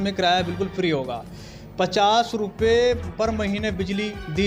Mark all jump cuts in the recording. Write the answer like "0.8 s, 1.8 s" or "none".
none